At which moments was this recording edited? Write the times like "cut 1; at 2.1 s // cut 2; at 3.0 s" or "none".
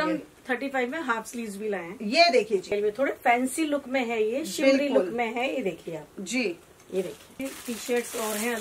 cut 1; at 2.7 s // cut 2; at 7.4 s